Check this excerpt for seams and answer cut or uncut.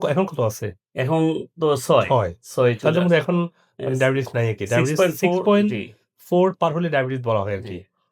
uncut